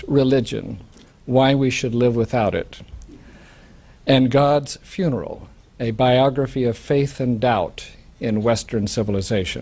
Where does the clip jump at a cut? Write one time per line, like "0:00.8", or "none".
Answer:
0:02.0